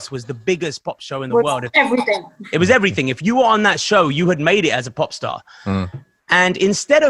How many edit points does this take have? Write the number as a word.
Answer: zero